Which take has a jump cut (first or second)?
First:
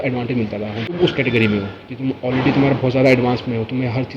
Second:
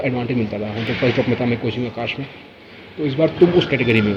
first